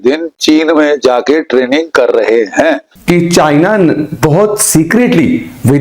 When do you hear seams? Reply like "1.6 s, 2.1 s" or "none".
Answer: 2.9 s